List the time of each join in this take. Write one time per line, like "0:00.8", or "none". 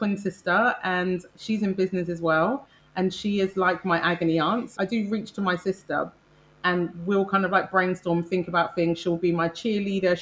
0:04.7